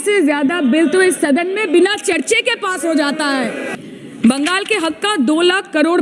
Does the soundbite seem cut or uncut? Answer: cut